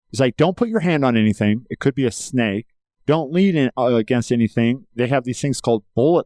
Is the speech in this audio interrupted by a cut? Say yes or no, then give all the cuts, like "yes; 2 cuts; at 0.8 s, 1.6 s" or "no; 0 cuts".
no; 0 cuts